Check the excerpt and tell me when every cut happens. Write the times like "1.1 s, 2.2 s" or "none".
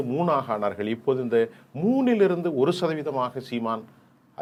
none